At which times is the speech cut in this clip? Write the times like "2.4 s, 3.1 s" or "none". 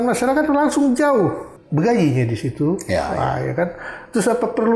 1.5 s